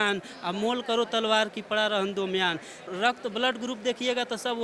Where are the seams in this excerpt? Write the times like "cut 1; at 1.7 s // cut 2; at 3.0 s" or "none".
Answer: cut 1; at 2.9 s